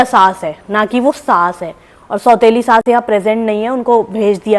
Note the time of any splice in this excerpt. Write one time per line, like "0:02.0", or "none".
none

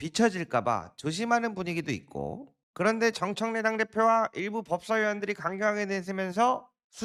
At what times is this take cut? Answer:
none

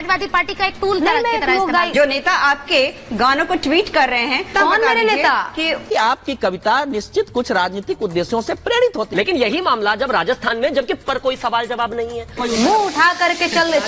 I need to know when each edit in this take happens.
0:01.9
0:04.5
0:05.9

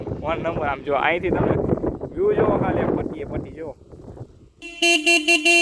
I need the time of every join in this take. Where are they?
0:04.6

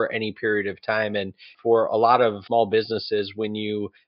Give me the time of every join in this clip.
0:01.5
0:02.4

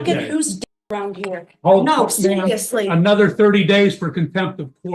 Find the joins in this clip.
none

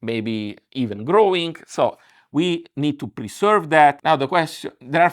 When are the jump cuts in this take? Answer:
0:04.0

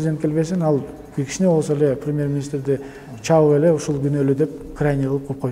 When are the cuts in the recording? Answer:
none

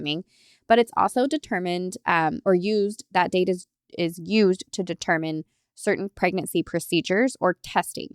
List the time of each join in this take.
none

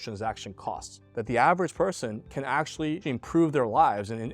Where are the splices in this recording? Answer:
0:01.0
0:03.0

